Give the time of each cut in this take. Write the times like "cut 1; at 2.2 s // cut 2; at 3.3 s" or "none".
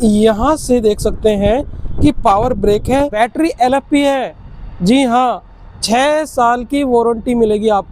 cut 1; at 3.2 s